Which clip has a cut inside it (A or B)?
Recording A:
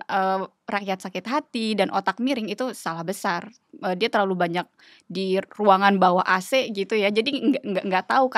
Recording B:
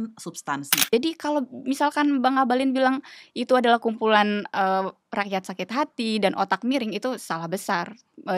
B